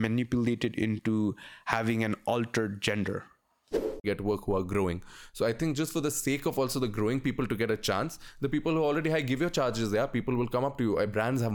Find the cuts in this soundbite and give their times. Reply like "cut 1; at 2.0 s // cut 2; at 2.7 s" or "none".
cut 1; at 4.0 s